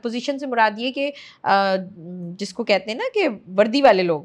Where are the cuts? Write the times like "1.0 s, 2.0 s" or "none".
none